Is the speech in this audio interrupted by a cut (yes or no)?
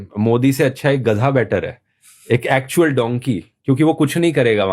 yes